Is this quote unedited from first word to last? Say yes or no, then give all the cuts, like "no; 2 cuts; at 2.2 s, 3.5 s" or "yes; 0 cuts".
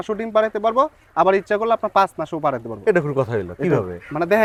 yes; 0 cuts